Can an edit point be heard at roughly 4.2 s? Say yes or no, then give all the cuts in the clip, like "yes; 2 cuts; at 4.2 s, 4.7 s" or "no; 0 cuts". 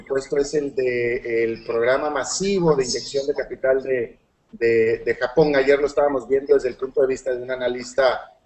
yes; 1 cut; at 4.2 s